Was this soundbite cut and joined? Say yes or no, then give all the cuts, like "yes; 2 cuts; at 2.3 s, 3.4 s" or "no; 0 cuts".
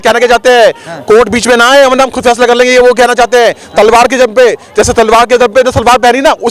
no; 0 cuts